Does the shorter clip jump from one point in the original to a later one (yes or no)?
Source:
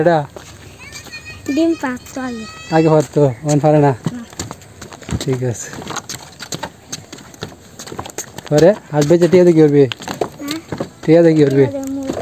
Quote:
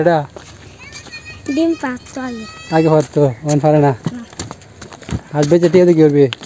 yes